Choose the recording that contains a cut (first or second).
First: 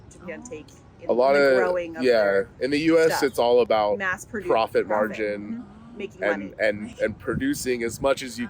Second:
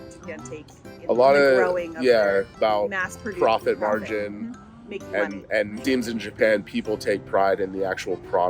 second